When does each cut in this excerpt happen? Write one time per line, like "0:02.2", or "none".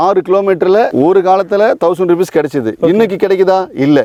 none